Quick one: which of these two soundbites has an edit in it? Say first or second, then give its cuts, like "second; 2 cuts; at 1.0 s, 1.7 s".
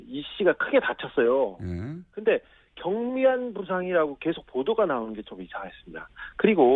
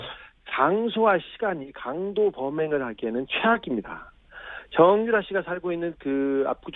first; 1 cut; at 4.2 s